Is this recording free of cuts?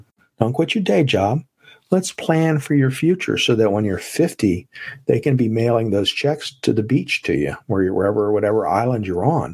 yes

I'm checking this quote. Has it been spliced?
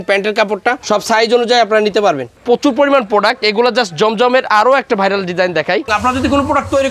yes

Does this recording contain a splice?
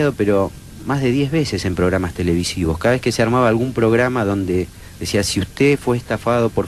yes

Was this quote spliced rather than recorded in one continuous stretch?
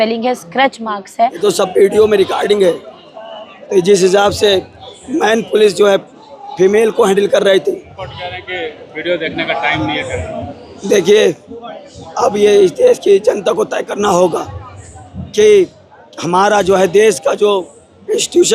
yes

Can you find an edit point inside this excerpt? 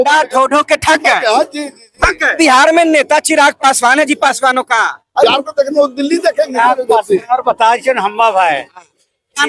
yes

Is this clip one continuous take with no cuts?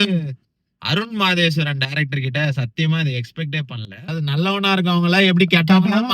no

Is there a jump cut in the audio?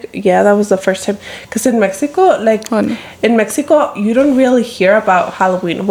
no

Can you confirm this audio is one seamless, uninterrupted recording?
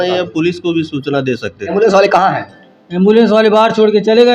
no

